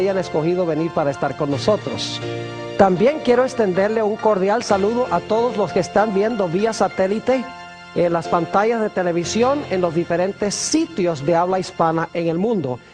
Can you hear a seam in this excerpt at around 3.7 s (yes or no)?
yes